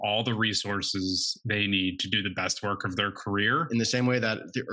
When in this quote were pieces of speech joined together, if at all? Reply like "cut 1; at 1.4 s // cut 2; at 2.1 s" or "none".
cut 1; at 3.7 s